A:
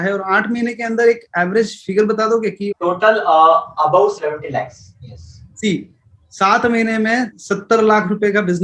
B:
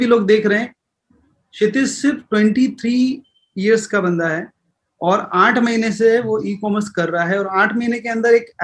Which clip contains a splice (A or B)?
A